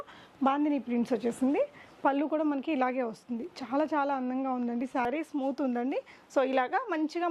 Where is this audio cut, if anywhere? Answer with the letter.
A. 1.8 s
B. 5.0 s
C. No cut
B